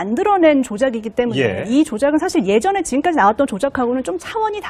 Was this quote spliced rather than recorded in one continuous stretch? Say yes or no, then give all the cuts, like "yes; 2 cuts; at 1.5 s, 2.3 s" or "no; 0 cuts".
yes; 1 cut; at 3.4 s